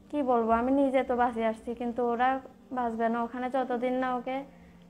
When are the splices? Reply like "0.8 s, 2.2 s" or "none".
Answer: none